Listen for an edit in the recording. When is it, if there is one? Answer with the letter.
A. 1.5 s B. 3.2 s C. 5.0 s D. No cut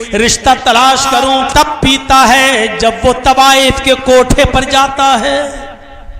A